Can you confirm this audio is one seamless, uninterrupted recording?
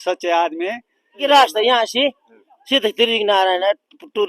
no; 1 cut; at 1.2 s

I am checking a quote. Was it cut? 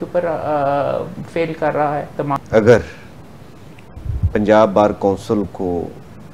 yes; 1 cut; at 2.4 s

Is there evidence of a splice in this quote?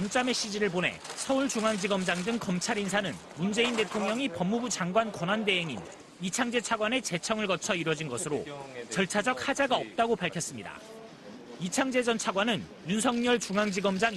no; 0 cuts

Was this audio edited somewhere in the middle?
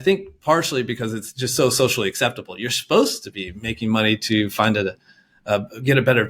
no; 0 cuts

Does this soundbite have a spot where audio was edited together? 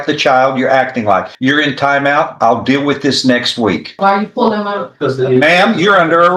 yes; 2 cuts; at 1.3 s, 4.0 s

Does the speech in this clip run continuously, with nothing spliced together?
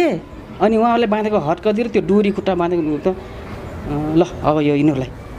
yes; 0 cuts

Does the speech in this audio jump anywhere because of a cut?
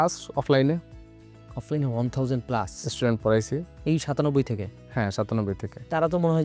no; 0 cuts

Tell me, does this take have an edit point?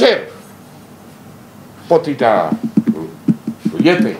no; 0 cuts

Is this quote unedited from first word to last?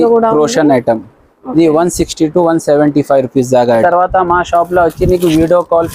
no; 1 cut; at 3.8 s

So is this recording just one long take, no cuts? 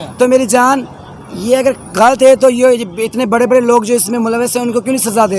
yes; 0 cuts

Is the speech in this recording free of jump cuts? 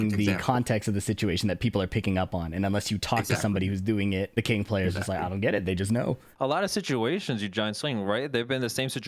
no; 2 cuts; at 4.3 s, 6.3 s

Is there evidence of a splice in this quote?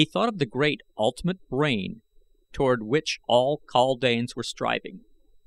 no; 0 cuts

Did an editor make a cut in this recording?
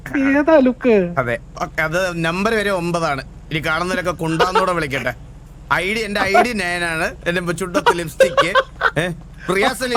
no; 0 cuts

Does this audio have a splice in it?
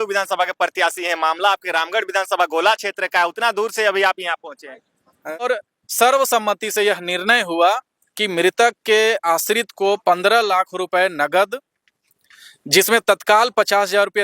yes; 1 cut; at 5.4 s

